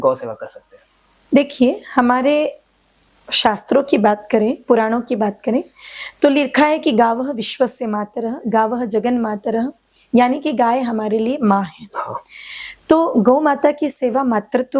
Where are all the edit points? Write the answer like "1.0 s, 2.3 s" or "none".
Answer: none